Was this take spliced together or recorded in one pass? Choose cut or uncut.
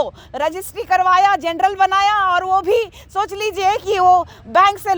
uncut